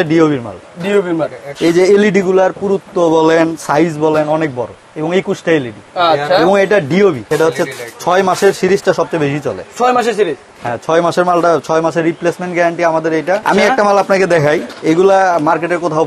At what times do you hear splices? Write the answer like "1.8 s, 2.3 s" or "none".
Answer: 1.4 s, 7.3 s, 13.4 s